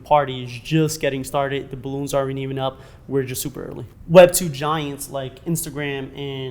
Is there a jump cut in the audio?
yes; 1 cut; at 3.8 s

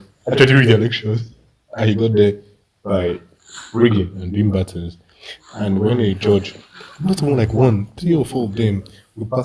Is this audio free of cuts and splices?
yes; 0 cuts

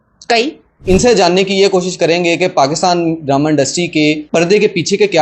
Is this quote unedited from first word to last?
no; 2 cuts; at 0.8 s, 4.2 s

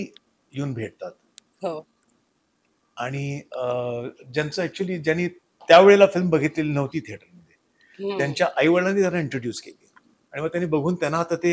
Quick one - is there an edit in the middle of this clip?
no; 0 cuts

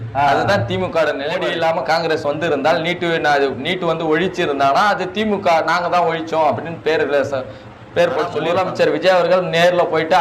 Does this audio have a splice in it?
yes; 2 cuts; at 1.4 s, 8.4 s

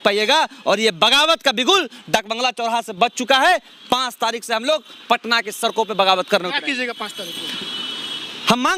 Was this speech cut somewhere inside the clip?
no; 0 cuts

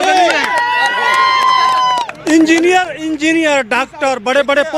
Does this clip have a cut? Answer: no; 0 cuts

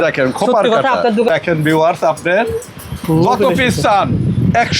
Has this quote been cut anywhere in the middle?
yes; 1 cut; at 1.3 s

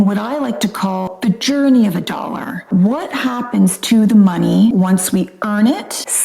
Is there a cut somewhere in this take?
yes; 2 cuts; at 1.1 s, 2.5 s

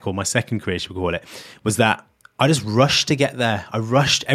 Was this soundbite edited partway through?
yes; 1 cut; at 2.2 s

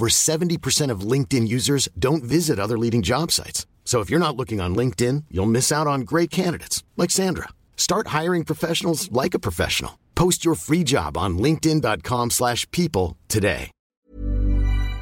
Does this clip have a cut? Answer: yes; 1 cut; at 14.0 s

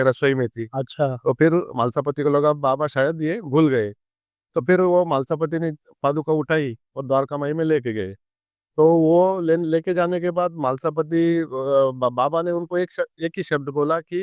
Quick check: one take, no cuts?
yes; 0 cuts

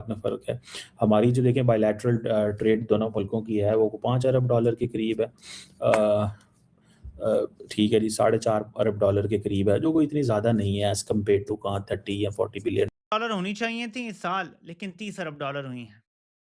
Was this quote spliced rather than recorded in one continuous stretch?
yes; 1 cut; at 12.9 s

